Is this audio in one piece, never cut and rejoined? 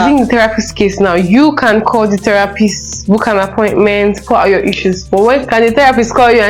yes; 0 cuts

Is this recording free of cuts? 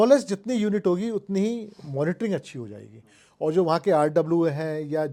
yes; 0 cuts

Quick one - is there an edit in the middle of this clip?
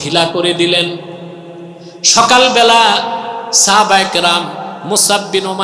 no; 0 cuts

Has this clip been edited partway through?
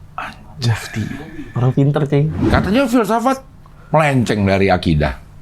yes; 1 cut; at 2.4 s

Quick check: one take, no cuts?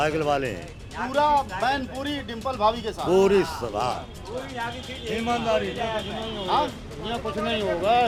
yes; 0 cuts

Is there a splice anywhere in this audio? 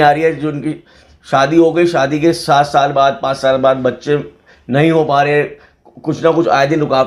no; 0 cuts

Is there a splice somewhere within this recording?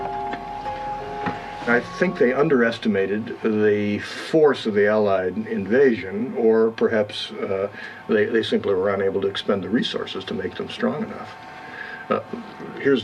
yes; 1 cut; at 11.1 s

